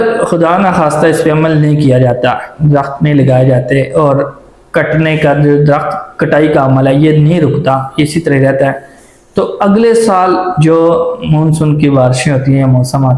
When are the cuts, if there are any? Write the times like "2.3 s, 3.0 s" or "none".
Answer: none